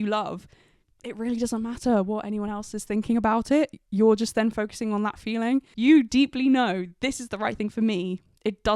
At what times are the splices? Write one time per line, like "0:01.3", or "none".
0:05.7

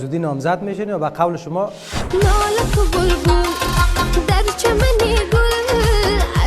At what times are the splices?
0:01.9

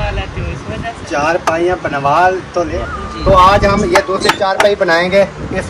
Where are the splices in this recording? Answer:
0:02.7

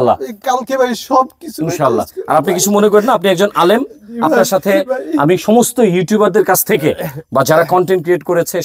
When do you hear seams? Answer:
none

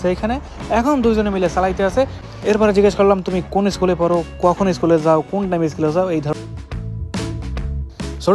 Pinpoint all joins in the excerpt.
0:02.2
0:06.3

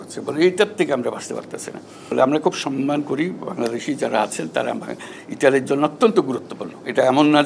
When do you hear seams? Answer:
0:02.1

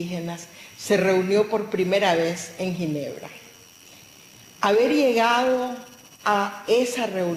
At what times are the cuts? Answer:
0:01.0

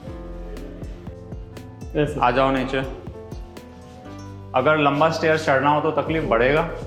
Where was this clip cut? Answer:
none

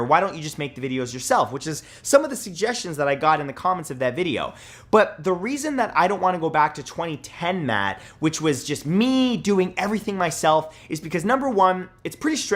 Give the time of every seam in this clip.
none

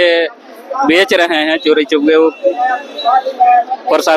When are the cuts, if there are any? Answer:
none

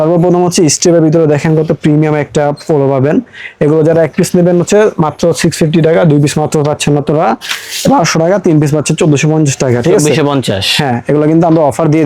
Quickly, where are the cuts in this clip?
none

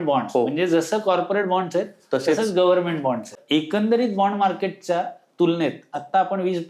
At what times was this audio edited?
0:03.3

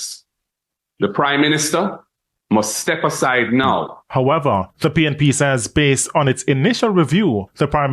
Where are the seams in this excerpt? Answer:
0:04.0

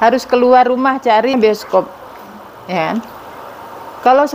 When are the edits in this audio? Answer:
0:01.3

